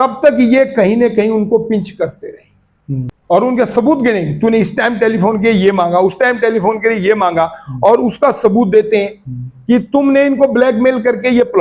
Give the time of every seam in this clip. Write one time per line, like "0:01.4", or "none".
0:03.2